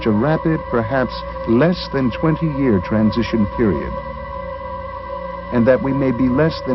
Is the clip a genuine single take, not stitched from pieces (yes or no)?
yes